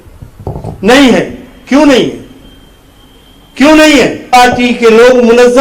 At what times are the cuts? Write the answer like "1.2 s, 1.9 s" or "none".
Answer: 4.3 s